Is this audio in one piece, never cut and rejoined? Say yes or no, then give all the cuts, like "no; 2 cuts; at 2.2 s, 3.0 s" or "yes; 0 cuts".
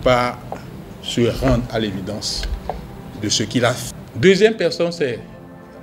no; 1 cut; at 3.9 s